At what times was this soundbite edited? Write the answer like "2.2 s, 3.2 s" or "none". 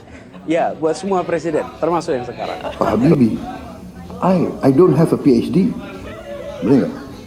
2.7 s